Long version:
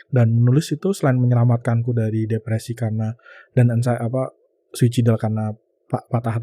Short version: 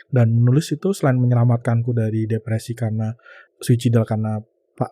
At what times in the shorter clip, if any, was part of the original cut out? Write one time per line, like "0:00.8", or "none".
0:03.3